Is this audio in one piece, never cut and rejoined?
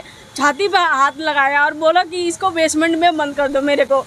yes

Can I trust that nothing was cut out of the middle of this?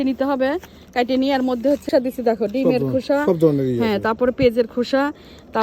no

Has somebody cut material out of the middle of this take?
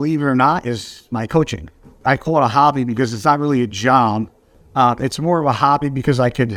no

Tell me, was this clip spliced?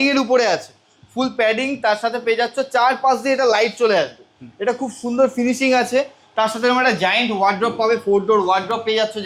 no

